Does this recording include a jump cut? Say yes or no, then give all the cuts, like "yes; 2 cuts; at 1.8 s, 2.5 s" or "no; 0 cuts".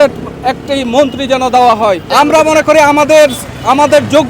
yes; 1 cut; at 2.0 s